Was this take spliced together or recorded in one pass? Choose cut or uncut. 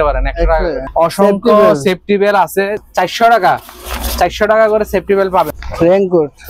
cut